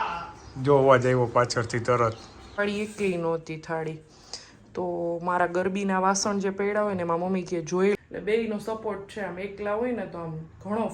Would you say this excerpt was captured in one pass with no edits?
no; 2 cuts; at 2.6 s, 7.9 s

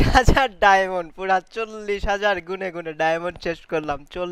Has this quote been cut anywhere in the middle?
no; 0 cuts

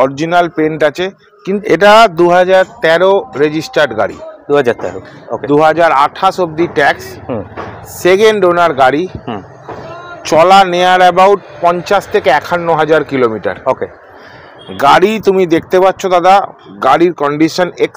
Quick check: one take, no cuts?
no; 1 cut; at 1.5 s

